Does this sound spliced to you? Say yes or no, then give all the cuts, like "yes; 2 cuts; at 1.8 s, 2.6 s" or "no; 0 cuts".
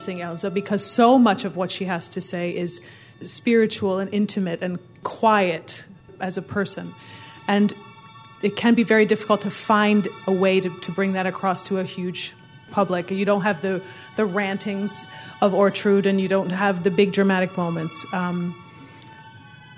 yes; 5 cuts; at 3.1 s, 4.9 s, 6.1 s, 8.2 s, 12.7 s